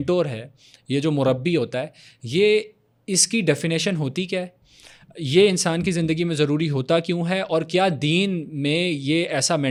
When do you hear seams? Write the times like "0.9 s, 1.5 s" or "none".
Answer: none